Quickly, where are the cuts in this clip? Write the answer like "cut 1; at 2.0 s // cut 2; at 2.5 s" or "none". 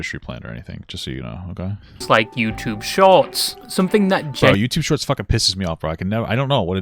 none